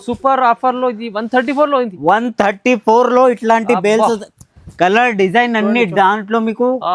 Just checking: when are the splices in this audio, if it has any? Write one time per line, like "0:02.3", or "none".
none